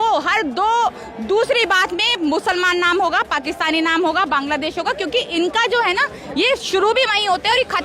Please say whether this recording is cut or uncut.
uncut